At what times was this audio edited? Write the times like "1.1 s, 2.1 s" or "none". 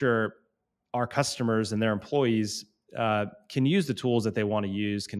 none